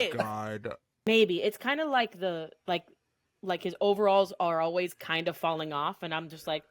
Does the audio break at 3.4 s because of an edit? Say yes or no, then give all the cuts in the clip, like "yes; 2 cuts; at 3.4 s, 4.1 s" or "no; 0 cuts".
no; 1 cut; at 1.1 s